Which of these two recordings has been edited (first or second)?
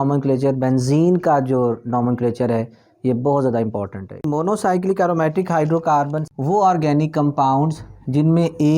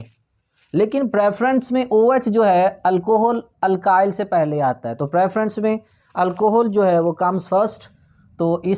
first